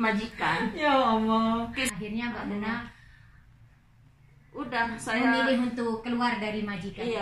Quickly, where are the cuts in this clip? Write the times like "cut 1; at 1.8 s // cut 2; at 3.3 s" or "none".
cut 1; at 1.9 s